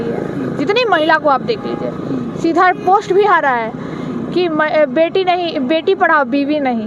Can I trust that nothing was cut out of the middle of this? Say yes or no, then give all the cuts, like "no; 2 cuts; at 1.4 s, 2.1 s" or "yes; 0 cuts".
yes; 0 cuts